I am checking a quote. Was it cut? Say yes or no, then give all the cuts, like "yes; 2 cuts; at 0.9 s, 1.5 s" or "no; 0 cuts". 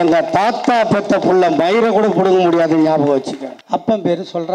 yes; 1 cut; at 3.5 s